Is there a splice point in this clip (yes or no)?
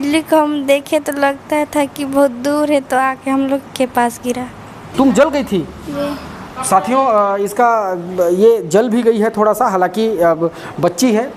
yes